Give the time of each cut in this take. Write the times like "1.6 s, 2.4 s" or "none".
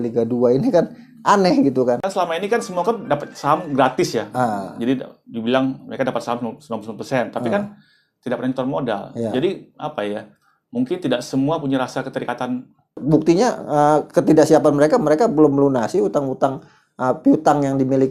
2.1 s, 13.0 s